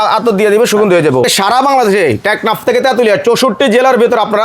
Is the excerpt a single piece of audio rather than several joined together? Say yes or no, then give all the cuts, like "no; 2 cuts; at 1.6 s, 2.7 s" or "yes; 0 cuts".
no; 1 cut; at 1.2 s